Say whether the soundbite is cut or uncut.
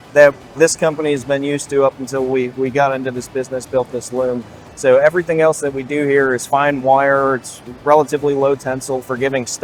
uncut